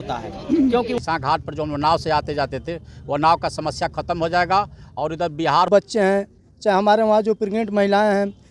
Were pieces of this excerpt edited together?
yes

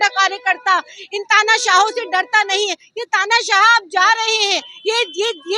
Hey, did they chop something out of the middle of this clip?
no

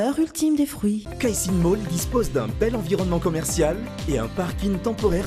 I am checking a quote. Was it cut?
yes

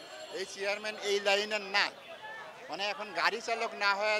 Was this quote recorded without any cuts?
yes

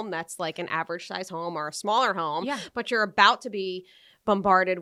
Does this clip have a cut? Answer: no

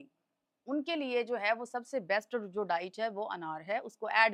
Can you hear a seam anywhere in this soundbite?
no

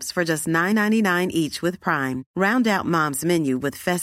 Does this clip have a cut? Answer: no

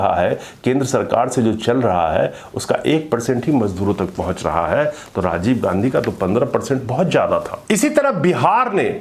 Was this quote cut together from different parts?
yes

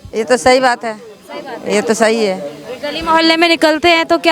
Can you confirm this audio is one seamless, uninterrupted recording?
yes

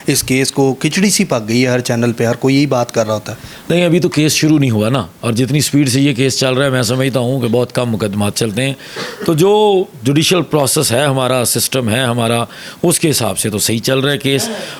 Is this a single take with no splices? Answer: yes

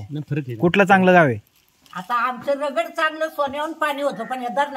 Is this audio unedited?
yes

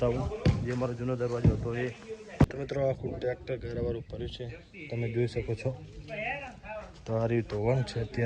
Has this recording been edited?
yes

